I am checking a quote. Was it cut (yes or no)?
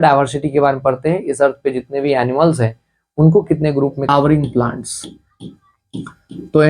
yes